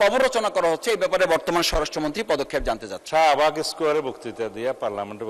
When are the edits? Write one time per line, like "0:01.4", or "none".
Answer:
0:02.9